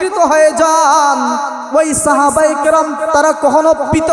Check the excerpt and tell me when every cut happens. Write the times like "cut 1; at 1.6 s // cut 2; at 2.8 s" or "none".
cut 1; at 1.5 s